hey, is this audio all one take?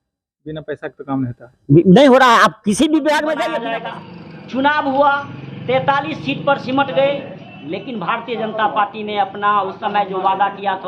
no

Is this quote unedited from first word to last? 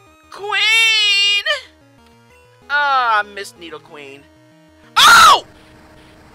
yes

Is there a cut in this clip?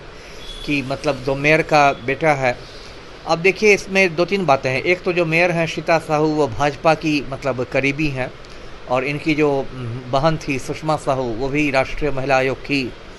no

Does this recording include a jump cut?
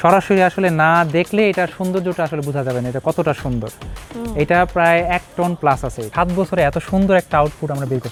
no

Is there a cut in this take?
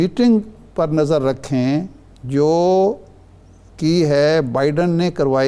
no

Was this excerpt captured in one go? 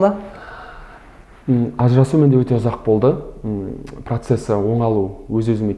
yes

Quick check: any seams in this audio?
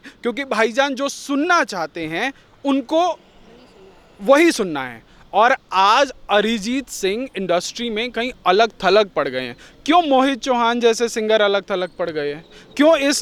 no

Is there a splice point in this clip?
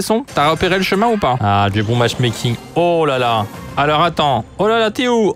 yes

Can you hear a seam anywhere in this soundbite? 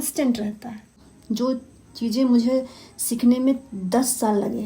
yes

